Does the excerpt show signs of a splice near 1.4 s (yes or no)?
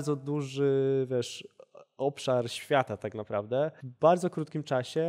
no